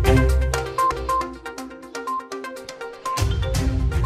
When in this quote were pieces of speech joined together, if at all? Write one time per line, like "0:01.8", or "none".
none